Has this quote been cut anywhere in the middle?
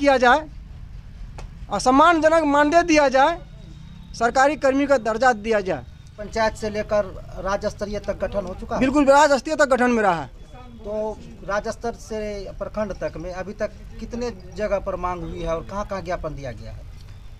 no; 0 cuts

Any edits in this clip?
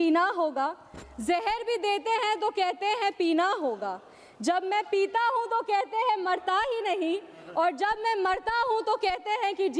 no; 0 cuts

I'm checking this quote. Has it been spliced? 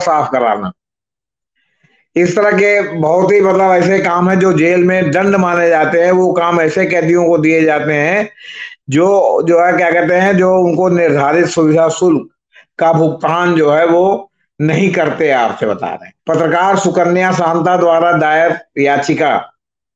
yes; 1 cut; at 16.1 s

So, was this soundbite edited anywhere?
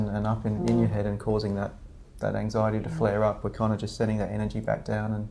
no; 0 cuts

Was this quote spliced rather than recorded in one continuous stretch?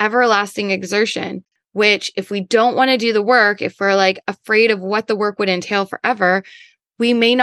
no; 0 cuts

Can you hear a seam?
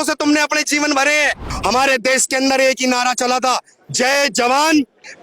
yes; 1 cut; at 1.4 s

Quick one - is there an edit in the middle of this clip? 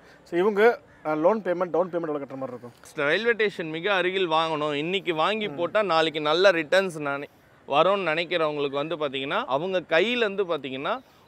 yes; 2 cuts; at 2.9 s, 9.4 s

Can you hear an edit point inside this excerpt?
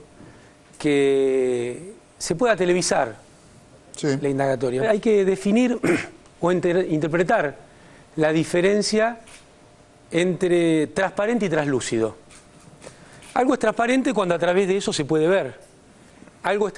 no; 0 cuts

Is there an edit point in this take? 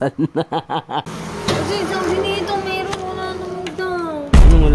yes; 1 cut; at 1.1 s

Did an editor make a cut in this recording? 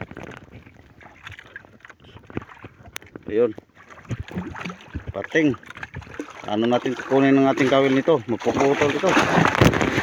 no; 0 cuts

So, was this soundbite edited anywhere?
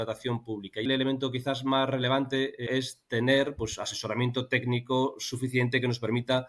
yes; 2 cuts; at 0.9 s, 2.6 s

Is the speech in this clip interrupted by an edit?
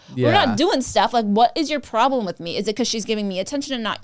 no; 0 cuts

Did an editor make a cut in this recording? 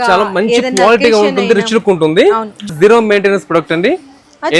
yes; 1 cut; at 2.7 s

